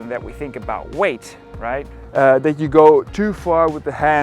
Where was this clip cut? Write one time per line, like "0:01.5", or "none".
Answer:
0:02.0